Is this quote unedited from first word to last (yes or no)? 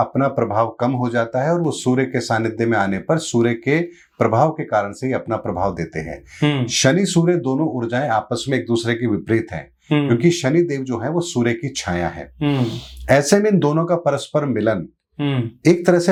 yes